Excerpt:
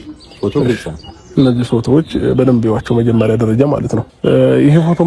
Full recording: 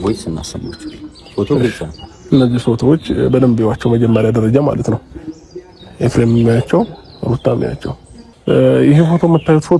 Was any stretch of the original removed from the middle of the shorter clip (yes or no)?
yes